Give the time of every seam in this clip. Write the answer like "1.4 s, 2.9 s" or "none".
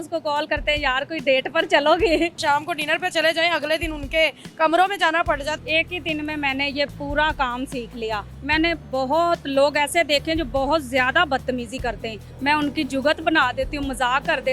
2.4 s, 5.6 s, 8.3 s, 12.2 s